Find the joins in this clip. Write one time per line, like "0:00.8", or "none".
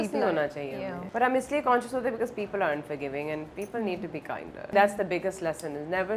0:01.0
0:04.7